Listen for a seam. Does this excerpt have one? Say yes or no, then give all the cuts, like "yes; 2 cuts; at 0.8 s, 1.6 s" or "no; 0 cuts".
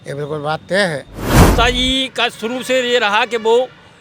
yes; 1 cut; at 1.4 s